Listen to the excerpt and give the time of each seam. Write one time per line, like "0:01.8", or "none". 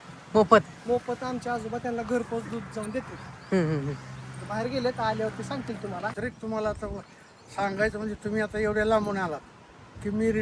0:06.2